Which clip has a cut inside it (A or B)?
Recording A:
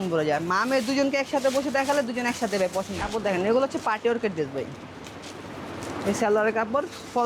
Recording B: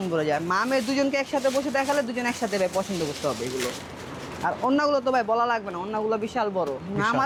A